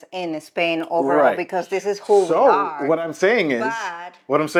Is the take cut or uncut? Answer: uncut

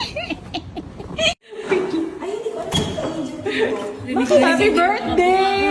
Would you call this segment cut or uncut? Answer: cut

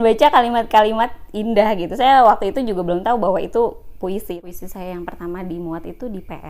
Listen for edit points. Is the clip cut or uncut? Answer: cut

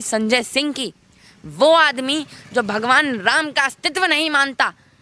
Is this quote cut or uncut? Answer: uncut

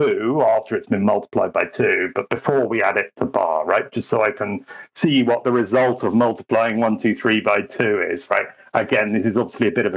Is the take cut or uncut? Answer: uncut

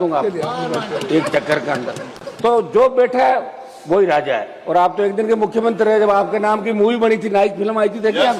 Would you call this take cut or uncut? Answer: uncut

